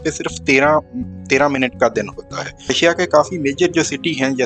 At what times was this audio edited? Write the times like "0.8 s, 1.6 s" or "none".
2.7 s